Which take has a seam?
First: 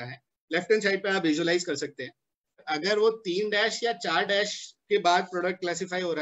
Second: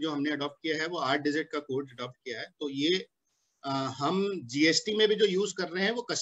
first; 1 cut; at 2.6 s

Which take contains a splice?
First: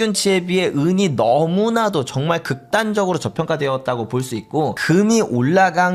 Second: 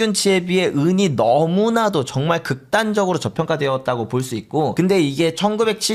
first; 1 cut; at 4.7 s

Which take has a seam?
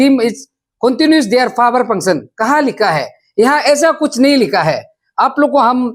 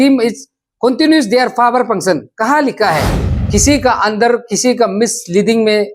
second; 1 cut; at 3.2 s

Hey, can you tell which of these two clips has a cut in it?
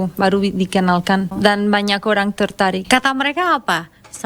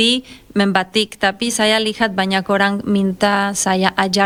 first; 2 cuts; at 1.3 s, 2.8 s

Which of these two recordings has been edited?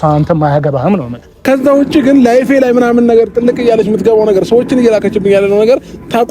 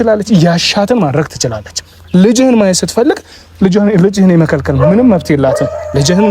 first; 1 cut; at 1.3 s

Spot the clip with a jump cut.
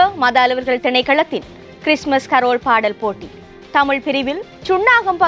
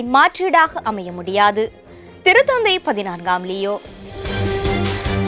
second; 1 cut; at 4.2 s

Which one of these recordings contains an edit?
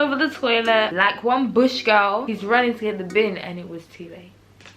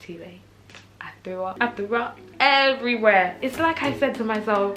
first; 2 cuts; at 0.9 s, 2.2 s

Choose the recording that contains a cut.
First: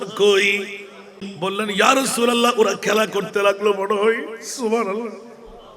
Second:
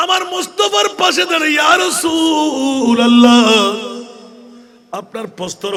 first; 1 cut; at 1.2 s

